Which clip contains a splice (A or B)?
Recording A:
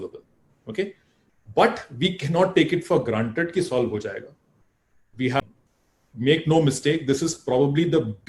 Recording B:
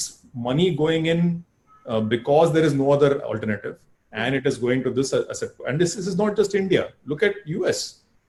A